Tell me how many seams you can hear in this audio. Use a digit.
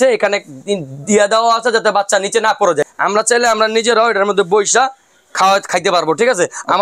1